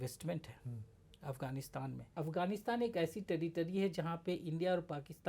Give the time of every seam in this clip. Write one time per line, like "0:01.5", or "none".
0:02.1